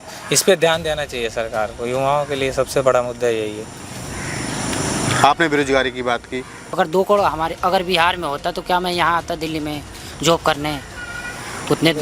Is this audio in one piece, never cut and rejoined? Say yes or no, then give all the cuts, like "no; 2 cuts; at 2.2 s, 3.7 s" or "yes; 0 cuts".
no; 1 cut; at 6.8 s